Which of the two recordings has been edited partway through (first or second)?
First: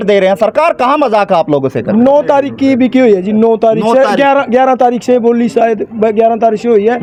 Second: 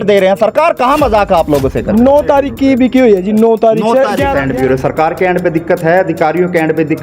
second